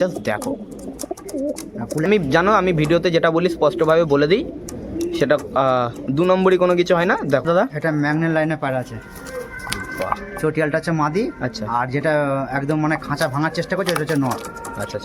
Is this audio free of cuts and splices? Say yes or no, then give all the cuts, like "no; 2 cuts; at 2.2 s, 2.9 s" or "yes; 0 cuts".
no; 2 cuts; at 2.1 s, 7.4 s